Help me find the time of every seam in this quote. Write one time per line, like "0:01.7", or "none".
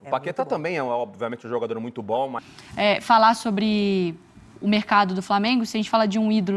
0:02.4